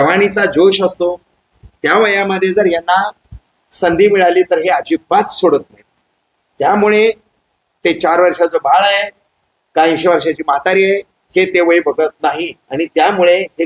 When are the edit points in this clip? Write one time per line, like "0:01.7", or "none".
none